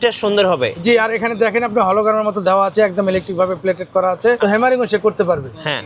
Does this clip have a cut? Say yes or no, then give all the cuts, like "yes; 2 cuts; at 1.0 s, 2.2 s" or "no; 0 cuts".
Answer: yes; 1 cut; at 4.4 s